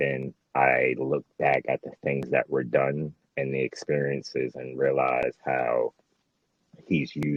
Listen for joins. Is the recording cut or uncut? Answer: uncut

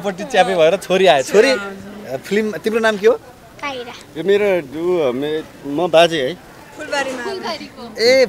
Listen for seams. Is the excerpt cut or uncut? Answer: uncut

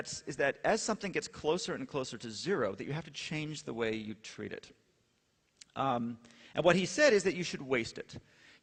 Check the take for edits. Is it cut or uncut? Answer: uncut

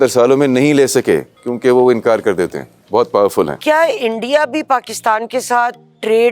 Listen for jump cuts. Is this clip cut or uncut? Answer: cut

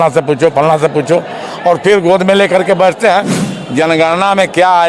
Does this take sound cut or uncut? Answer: cut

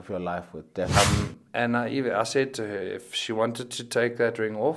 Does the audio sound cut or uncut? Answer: cut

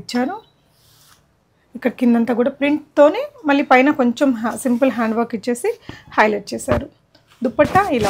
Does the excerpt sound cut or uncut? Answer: uncut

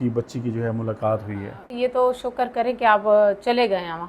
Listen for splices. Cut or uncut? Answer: cut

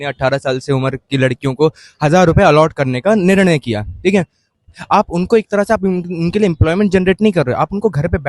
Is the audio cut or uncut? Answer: cut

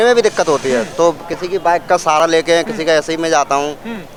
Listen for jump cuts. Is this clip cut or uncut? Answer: uncut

